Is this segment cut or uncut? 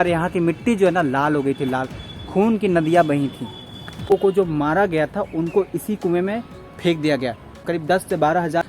cut